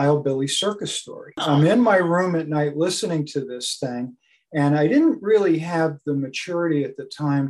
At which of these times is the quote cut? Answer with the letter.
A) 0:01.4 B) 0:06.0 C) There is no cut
A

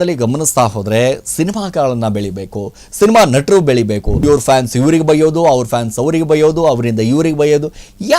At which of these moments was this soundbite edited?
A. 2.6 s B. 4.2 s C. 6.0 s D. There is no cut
B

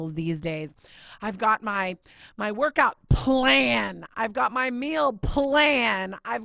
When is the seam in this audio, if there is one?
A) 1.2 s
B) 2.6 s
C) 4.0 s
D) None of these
D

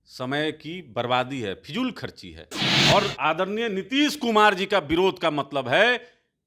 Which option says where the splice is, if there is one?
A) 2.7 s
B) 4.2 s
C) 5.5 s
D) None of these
A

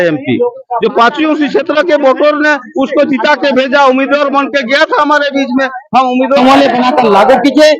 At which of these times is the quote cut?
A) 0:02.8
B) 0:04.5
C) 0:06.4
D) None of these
C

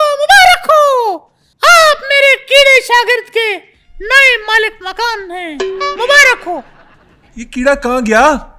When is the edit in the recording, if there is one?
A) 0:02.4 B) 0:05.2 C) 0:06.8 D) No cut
D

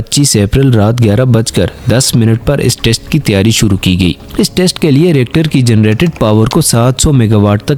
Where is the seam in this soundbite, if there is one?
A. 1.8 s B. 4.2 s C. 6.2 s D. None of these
D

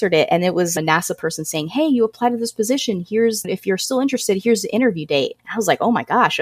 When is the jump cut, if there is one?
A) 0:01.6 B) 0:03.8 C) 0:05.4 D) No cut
C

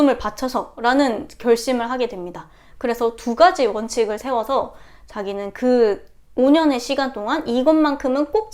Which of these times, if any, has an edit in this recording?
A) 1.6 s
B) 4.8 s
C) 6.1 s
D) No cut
D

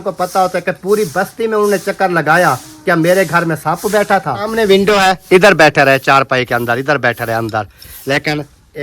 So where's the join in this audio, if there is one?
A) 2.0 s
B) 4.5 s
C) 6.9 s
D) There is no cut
B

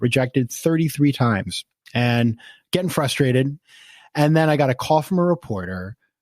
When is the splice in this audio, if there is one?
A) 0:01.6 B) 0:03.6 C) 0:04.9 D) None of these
B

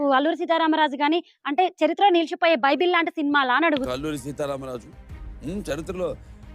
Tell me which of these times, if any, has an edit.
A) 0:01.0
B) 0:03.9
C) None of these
B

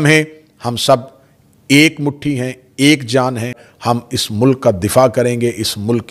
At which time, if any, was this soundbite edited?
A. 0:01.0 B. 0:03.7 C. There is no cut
B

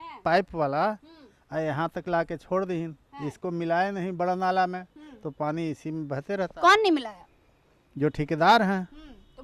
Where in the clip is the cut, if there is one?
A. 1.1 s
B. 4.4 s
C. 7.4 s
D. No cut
D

